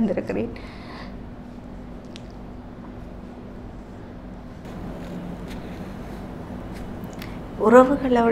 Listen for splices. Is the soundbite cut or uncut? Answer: uncut